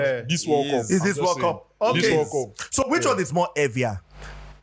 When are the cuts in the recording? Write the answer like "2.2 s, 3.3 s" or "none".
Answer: none